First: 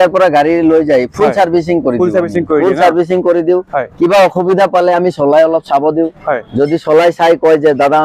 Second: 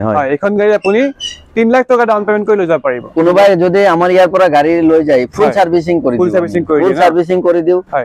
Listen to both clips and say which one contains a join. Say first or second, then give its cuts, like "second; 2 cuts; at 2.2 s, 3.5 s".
second; 1 cut; at 3.1 s